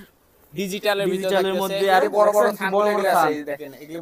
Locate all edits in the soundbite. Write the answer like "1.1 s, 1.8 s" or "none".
2.0 s